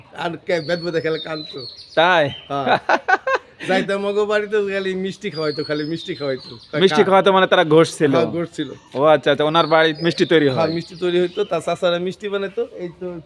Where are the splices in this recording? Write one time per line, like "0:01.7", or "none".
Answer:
none

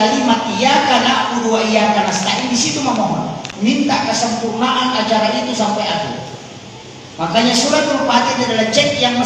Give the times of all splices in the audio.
none

